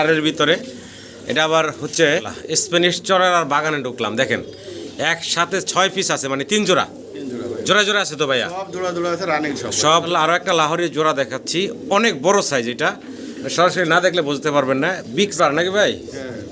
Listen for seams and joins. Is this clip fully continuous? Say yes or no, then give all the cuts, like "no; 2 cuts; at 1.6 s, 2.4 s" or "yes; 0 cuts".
no; 3 cuts; at 2.3 s, 10.0 s, 15.3 s